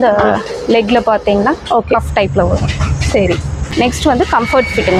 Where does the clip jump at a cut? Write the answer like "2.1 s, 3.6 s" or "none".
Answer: 3.7 s